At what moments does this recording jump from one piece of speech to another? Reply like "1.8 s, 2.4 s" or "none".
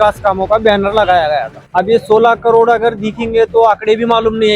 1.6 s